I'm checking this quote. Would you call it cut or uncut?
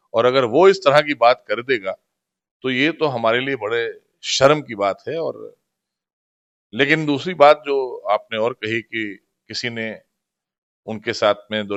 uncut